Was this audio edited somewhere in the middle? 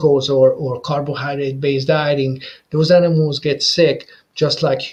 no; 0 cuts

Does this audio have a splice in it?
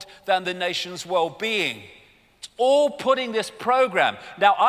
yes; 1 cut; at 0.9 s

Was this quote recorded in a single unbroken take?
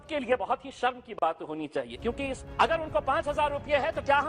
no; 1 cut; at 2.4 s

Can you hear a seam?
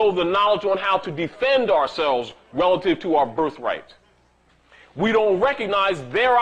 yes; 1 cut; at 2.5 s

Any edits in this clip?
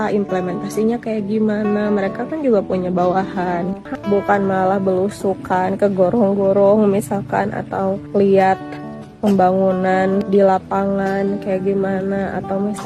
yes; 1 cut; at 3.8 s

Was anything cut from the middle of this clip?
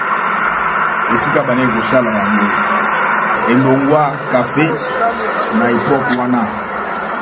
yes; 1 cut; at 3.3 s

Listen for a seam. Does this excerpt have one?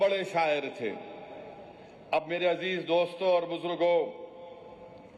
no; 0 cuts

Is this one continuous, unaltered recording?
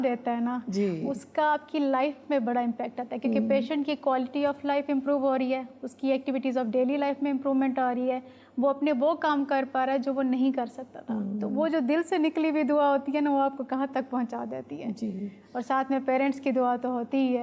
yes; 0 cuts

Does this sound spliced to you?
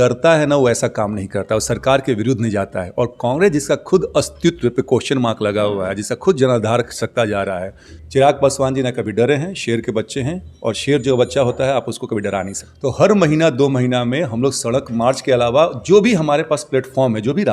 yes; 2 cuts; at 8.0 s, 12.6 s

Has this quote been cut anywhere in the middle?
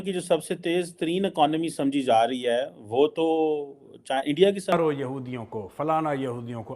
yes; 1 cut; at 4.7 s

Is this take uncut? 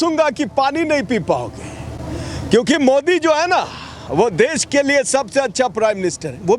yes; 0 cuts

